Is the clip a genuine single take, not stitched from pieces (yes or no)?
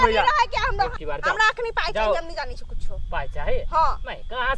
no